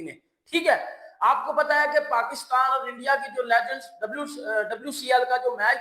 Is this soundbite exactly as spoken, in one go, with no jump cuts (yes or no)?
yes